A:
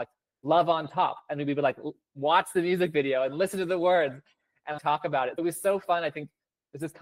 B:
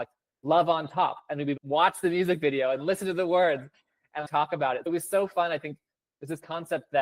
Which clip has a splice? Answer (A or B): B